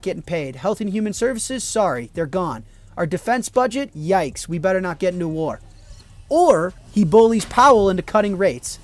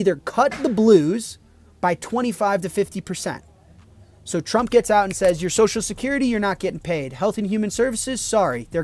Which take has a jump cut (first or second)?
first